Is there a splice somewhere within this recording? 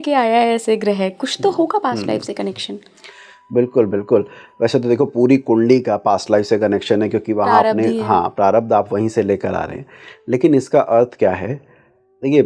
no; 0 cuts

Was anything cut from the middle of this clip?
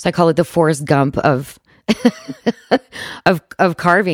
no; 0 cuts

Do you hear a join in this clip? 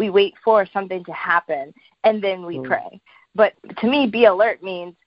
yes; 1 cut; at 3.5 s

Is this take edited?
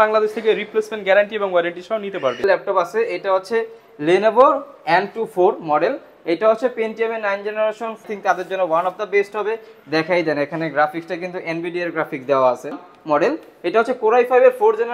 yes; 3 cuts; at 2.4 s, 8.0 s, 12.9 s

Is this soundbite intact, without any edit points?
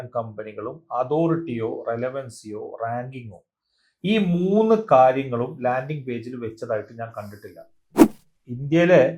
no; 1 cut; at 8.0 s

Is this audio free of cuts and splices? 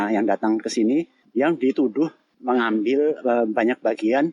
no; 2 cuts; at 1.2 s, 2.3 s

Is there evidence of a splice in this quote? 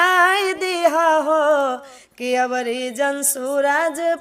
no; 0 cuts

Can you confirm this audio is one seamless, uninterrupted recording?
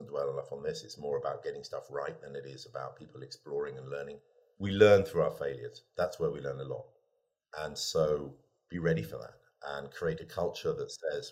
yes; 0 cuts

